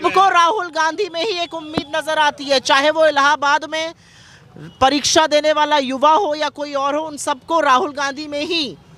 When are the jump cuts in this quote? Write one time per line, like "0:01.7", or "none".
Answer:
none